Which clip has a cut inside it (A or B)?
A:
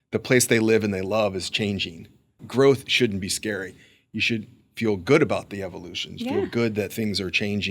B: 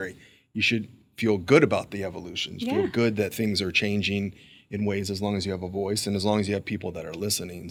A